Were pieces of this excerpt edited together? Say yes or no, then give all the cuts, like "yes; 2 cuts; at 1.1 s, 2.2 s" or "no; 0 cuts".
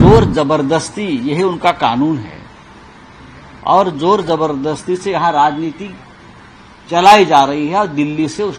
no; 0 cuts